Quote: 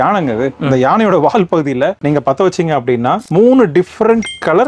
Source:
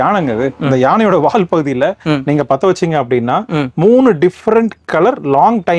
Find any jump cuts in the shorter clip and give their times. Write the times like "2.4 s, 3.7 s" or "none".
2.0 s, 3.2 s

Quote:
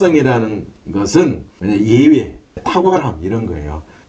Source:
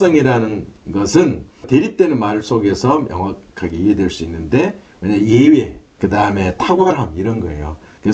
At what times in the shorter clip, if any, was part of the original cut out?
1.5 s, 2.6 s

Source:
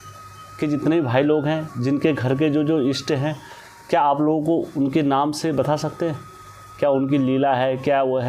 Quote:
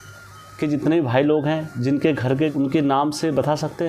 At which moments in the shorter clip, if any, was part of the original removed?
2.5 s

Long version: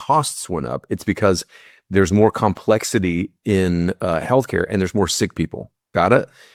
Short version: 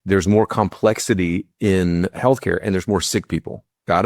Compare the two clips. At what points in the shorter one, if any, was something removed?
2.1 s

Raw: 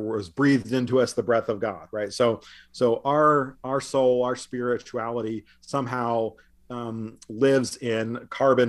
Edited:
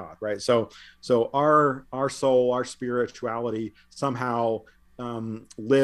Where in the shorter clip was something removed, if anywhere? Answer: none

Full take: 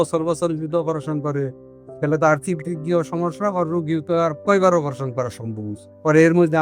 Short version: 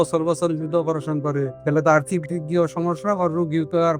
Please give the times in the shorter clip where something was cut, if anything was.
1.5 s

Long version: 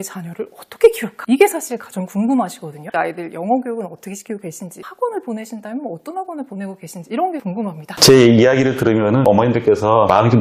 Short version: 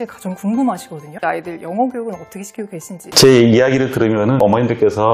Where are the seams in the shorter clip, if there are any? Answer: 3.0 s

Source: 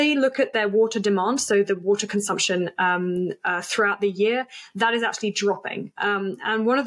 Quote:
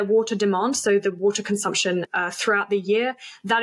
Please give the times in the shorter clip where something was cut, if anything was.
2.1 s

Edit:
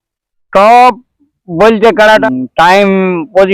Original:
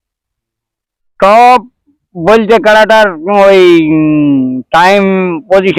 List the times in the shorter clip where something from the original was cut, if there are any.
2.2 s

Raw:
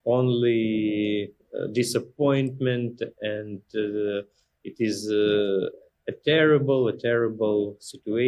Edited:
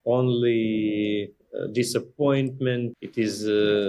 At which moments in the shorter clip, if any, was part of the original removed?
3.0 s

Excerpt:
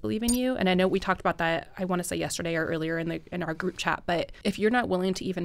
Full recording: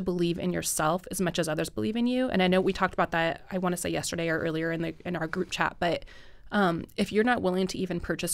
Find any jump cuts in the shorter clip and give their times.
4.3 s

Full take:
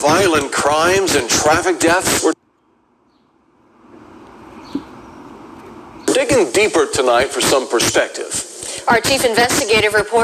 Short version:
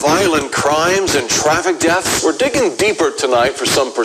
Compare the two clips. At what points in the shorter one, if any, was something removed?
2.4 s

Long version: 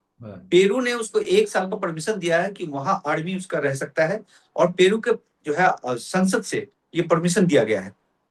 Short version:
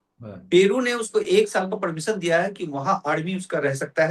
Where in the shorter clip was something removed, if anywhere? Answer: none

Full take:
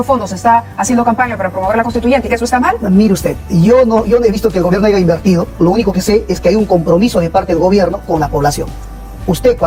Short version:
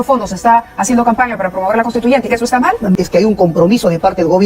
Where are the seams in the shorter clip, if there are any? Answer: 2.9 s

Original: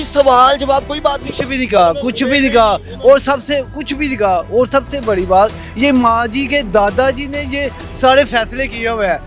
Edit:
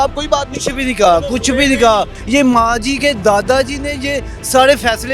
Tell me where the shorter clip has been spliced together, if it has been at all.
2.2 s

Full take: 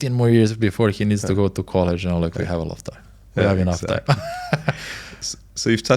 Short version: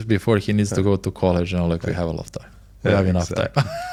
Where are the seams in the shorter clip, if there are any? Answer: none

